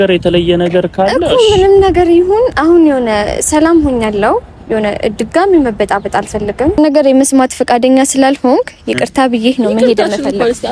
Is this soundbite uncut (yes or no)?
no